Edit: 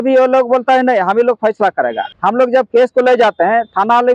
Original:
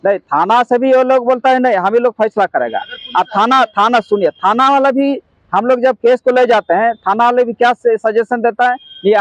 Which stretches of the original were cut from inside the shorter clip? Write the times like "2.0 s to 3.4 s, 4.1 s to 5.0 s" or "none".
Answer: 2.8 s to 5.4 s